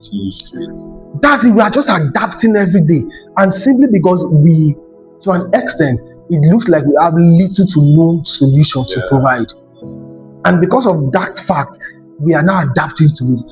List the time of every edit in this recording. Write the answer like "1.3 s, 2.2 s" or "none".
none